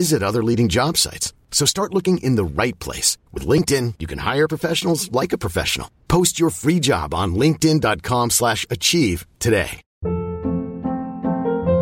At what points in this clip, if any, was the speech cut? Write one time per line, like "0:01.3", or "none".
0:09.8